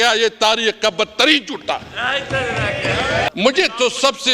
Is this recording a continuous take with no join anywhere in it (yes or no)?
no